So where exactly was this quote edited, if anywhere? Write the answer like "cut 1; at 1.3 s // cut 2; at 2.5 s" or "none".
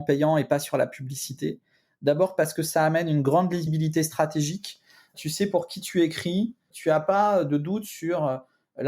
cut 1; at 3.7 s // cut 2; at 5.1 s // cut 3; at 6.7 s